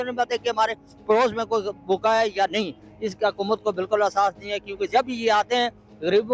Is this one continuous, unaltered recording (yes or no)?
yes